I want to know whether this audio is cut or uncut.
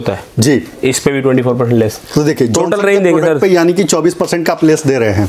uncut